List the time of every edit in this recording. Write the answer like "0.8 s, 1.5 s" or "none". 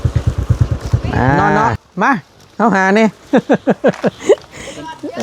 1.4 s